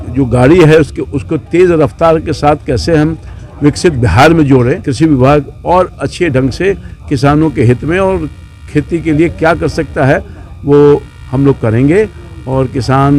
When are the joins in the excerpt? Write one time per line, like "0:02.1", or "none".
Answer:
0:04.9